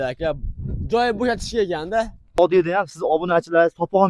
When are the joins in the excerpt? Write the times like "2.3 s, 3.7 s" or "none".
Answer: 2.4 s